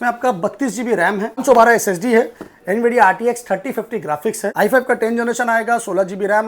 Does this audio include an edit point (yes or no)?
yes